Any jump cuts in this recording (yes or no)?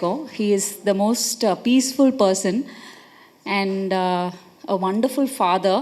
no